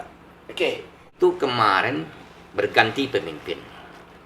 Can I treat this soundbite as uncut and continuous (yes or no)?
no